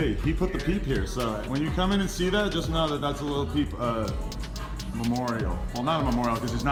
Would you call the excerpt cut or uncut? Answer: uncut